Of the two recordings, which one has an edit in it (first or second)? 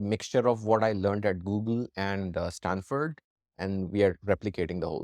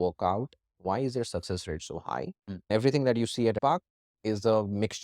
second